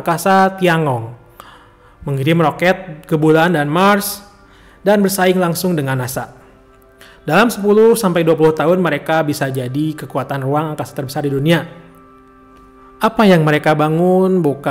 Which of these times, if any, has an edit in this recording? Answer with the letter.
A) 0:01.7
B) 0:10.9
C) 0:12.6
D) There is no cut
D